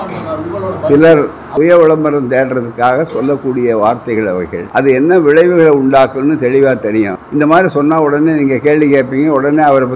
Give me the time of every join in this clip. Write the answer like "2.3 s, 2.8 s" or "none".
1.4 s, 4.6 s, 7.2 s